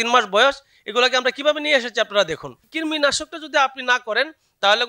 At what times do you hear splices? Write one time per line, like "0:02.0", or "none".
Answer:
0:02.7